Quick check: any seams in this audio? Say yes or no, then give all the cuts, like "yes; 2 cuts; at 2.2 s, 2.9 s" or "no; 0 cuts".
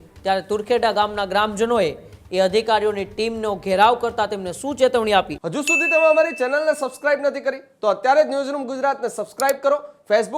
yes; 1 cut; at 5.4 s